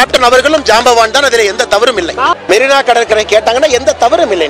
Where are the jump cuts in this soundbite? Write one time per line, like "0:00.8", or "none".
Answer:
0:02.4